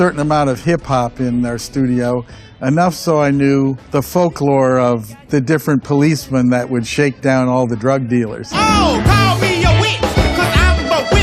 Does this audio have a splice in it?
no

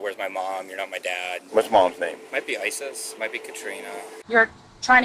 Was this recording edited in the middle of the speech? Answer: yes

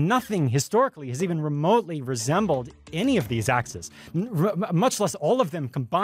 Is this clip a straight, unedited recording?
yes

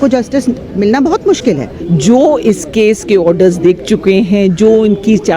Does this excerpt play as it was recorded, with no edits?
no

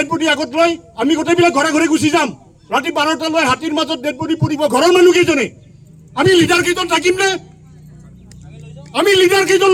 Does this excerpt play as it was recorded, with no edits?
yes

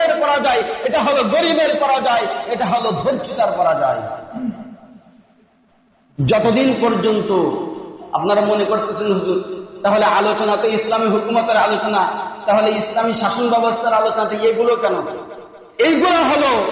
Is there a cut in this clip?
no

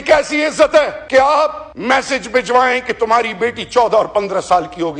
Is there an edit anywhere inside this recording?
yes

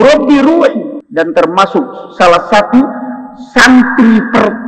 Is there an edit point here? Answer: yes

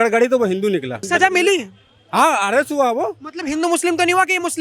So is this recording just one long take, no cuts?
no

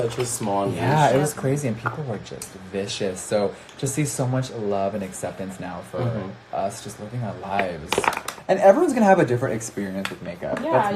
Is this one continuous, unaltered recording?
no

